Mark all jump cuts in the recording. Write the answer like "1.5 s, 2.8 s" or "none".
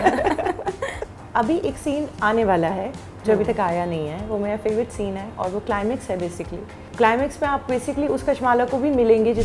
0.9 s, 6.8 s